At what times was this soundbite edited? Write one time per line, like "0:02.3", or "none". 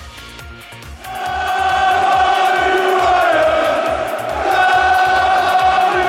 0:00.9